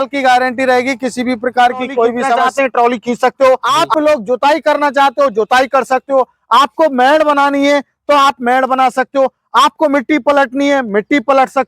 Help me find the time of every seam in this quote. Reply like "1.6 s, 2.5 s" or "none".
2.5 s, 3.7 s